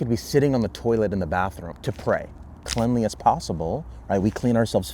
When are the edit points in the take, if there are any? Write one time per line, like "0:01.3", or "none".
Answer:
0:02.7